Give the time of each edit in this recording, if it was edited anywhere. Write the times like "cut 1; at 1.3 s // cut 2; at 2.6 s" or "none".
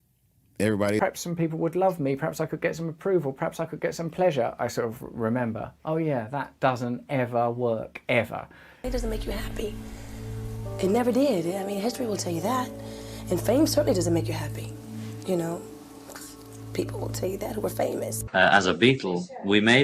cut 1; at 1.0 s // cut 2; at 8.8 s // cut 3; at 18.2 s